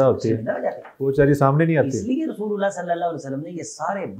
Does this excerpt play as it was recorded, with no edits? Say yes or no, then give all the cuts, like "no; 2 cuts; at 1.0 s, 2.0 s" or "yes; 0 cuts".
yes; 0 cuts